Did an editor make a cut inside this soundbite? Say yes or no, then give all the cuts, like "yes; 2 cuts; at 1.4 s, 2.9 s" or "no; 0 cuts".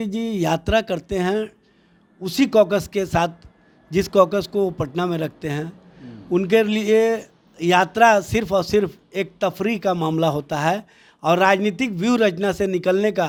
no; 0 cuts